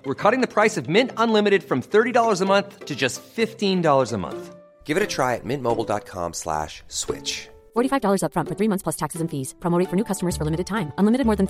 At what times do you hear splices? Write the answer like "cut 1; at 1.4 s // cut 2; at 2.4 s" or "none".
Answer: none